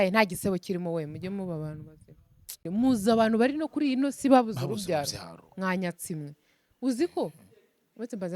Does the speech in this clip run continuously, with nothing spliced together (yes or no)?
no